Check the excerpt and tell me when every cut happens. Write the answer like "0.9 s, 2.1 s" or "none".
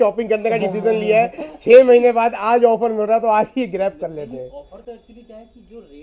none